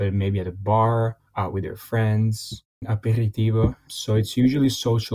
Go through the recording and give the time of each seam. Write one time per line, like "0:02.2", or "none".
0:01.2
0:02.8
0:03.9